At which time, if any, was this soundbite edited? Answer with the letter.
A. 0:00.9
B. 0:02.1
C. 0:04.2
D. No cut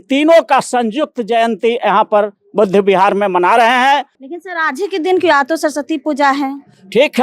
C